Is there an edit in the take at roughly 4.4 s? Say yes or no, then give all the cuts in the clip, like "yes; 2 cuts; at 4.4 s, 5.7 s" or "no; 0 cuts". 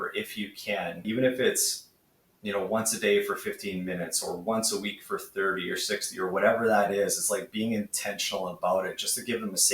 no; 1 cut; at 1.0 s